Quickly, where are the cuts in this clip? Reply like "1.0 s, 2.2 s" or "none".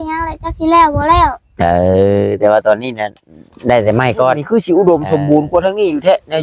4.4 s